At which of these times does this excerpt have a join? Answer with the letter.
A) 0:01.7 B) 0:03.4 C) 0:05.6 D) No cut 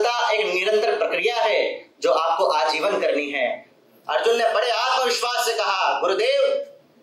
B